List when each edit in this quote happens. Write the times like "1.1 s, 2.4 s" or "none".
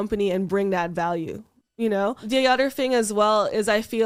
none